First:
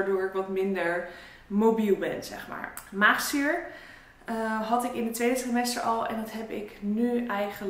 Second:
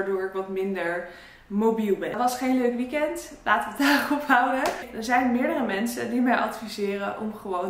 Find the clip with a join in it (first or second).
second